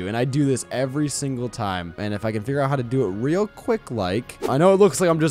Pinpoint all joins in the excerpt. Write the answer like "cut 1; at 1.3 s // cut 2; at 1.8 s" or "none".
cut 1; at 2.0 s // cut 2; at 4.5 s